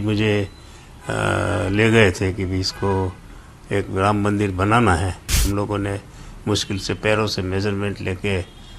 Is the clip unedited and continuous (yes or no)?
no